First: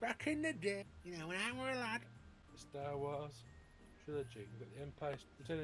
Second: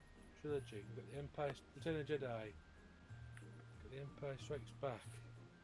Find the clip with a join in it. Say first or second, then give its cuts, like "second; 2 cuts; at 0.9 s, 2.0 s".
first; 2 cuts; at 0.9 s, 2.5 s